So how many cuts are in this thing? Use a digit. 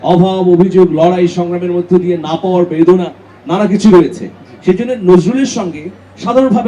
0